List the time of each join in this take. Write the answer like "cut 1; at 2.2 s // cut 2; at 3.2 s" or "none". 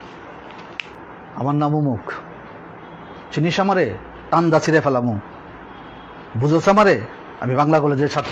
cut 1; at 0.9 s

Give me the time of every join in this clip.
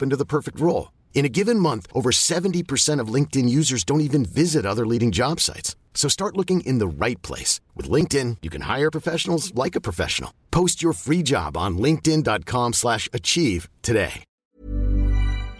cut 1; at 14.3 s

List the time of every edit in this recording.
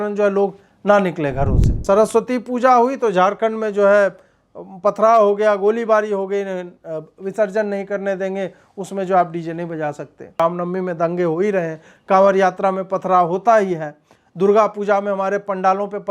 cut 1; at 1.8 s // cut 2; at 10.4 s

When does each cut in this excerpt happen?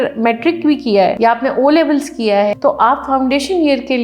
cut 1; at 1.2 s // cut 2; at 2.6 s

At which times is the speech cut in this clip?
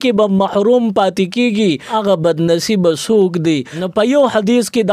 cut 1; at 1.9 s // cut 2; at 3.8 s

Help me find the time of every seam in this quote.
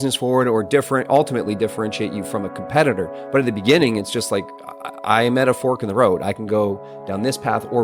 none

